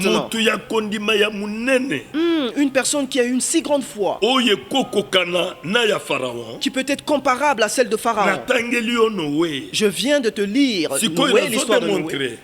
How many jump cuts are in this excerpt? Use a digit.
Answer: 0